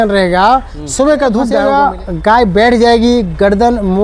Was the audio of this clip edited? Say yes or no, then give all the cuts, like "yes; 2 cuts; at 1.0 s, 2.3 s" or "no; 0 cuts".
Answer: yes; 1 cut; at 1.6 s